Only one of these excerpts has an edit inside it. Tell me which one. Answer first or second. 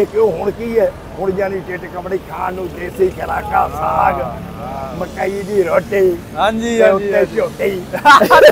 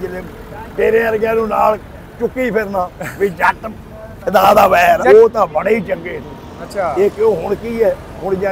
second